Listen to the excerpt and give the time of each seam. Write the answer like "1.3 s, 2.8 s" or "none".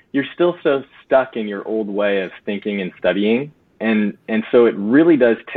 none